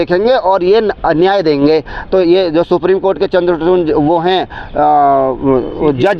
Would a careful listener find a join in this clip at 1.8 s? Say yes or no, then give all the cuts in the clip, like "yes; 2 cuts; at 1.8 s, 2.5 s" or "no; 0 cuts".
no; 0 cuts